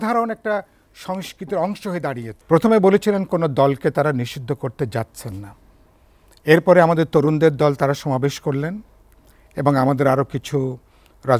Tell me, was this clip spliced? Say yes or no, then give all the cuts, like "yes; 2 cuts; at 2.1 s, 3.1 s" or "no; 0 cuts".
yes; 1 cut; at 2.3 s